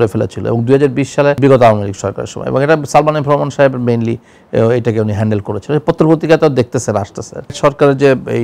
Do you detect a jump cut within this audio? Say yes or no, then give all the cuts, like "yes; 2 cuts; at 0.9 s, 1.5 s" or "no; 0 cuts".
no; 0 cuts